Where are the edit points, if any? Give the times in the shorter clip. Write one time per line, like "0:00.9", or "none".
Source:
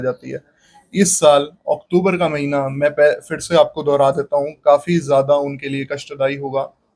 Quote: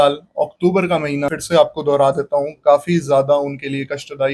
0:01.3